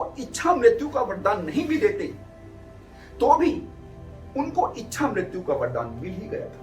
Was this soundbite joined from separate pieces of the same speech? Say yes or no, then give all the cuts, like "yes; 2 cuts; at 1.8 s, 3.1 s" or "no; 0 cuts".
no; 0 cuts